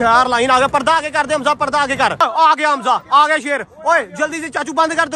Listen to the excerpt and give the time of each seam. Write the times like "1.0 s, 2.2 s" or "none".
2.2 s